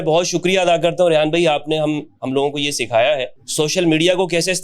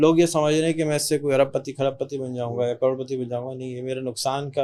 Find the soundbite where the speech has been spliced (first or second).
first